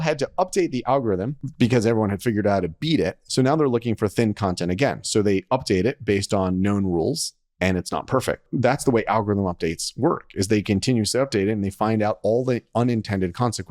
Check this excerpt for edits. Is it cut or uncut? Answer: cut